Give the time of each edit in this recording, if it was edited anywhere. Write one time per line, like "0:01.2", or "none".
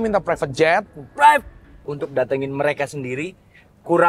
0:01.9